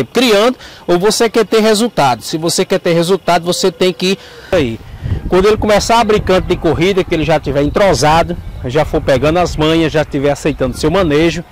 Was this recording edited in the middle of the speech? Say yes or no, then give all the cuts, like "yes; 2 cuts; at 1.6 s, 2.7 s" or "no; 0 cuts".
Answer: yes; 1 cut; at 4.5 s